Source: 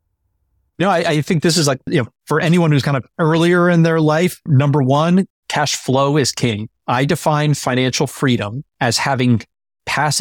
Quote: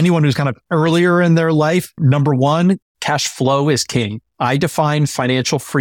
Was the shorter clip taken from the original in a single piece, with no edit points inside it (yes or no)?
yes